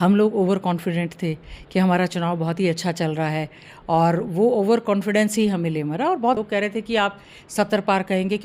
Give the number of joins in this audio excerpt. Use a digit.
1